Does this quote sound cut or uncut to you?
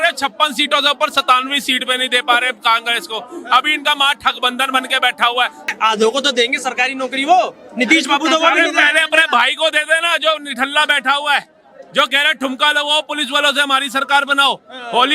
cut